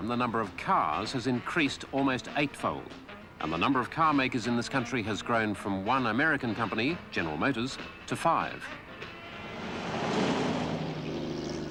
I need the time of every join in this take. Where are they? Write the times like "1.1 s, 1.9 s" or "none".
none